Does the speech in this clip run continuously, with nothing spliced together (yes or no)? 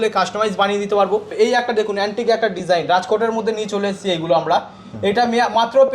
no